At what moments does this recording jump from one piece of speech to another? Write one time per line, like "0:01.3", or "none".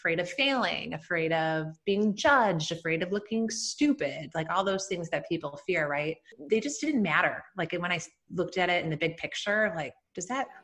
0:06.4